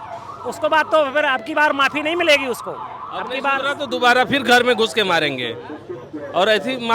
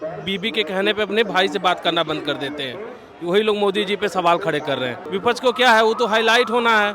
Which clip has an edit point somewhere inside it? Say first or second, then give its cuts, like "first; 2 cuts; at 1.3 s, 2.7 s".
second; 1 cut; at 5.0 s